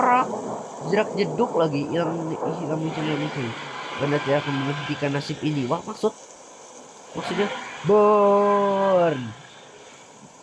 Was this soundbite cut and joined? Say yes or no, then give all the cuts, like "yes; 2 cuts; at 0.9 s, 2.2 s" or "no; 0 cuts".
no; 0 cuts